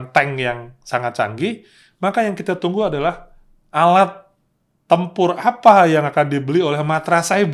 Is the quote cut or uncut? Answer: uncut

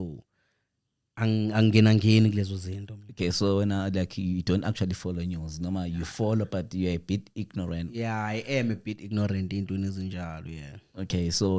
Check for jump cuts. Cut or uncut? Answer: uncut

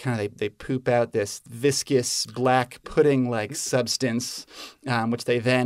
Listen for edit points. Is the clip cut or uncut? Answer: cut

